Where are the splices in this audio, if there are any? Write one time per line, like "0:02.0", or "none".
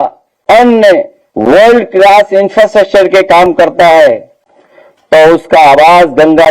0:01.2